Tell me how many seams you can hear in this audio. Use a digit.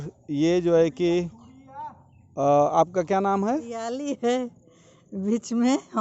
1